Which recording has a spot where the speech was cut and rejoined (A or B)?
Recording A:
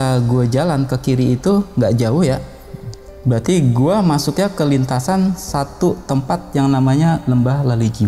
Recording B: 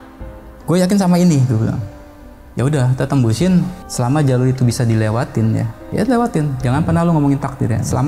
B